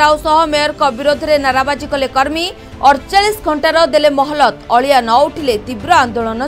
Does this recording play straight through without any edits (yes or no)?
yes